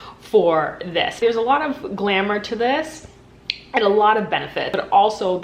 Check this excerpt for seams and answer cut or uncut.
cut